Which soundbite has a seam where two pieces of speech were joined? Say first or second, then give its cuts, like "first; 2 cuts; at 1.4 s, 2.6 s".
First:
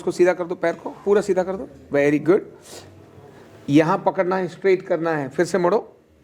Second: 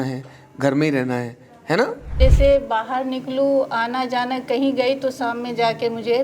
second; 1 cut; at 2.1 s